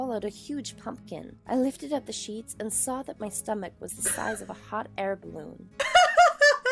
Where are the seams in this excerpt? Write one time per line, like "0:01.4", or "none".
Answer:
0:01.4
0:05.8

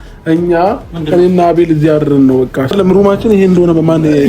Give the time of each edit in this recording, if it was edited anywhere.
0:02.7

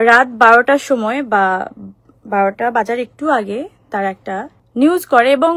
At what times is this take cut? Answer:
0:04.6

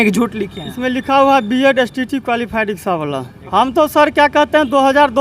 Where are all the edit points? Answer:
0:03.3

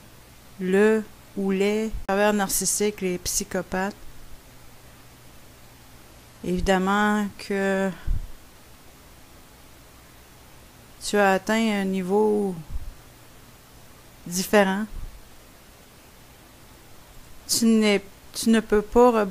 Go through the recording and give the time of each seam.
0:01.5

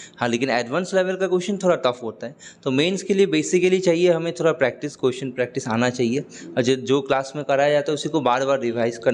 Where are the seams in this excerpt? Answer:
none

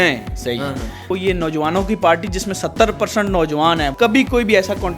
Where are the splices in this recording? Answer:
0:01.0
0:03.9

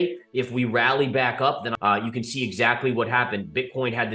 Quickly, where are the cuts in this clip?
0:01.7

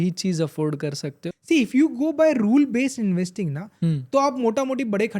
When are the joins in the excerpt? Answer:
0:01.3

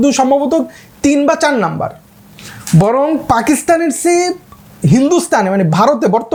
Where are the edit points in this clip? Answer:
none

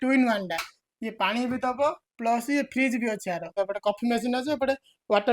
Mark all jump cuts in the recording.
0:03.5

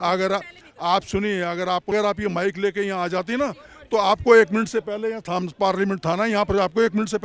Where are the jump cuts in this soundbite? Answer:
0:01.9

